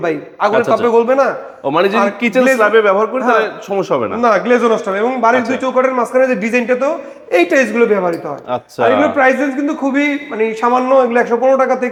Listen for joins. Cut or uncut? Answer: uncut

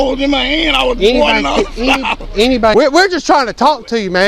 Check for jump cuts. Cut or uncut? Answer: cut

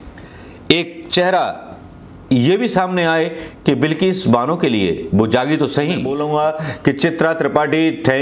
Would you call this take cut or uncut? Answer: cut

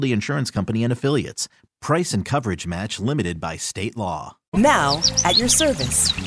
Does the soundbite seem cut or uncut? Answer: cut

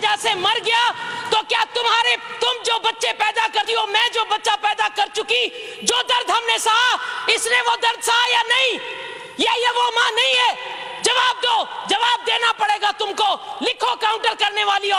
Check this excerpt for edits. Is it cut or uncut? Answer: uncut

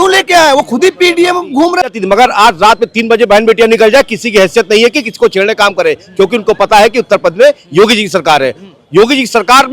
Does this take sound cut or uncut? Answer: cut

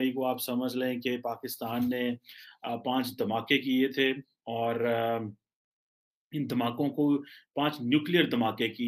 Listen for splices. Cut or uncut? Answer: uncut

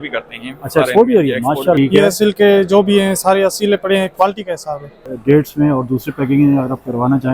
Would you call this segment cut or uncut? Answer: cut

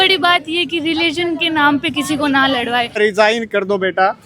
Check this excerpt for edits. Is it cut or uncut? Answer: cut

